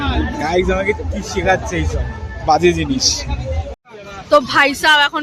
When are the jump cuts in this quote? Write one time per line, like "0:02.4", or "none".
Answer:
0:03.7